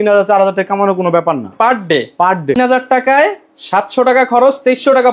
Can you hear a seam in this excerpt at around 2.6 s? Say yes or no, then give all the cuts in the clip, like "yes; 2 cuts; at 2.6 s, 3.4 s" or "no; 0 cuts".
yes; 1 cut; at 2.6 s